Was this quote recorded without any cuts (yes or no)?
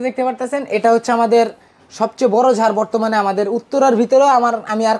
yes